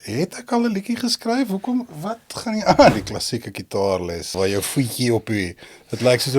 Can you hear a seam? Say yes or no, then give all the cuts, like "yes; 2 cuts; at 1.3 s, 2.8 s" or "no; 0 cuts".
yes; 2 cuts; at 2.9 s, 4.3 s